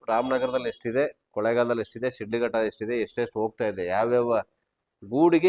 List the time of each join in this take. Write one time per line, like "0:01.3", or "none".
none